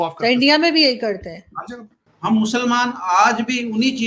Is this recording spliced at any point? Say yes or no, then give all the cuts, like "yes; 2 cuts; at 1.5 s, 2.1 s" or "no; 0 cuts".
yes; 1 cut; at 2.1 s